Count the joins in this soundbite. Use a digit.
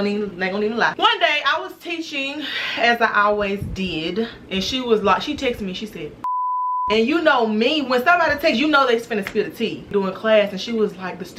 4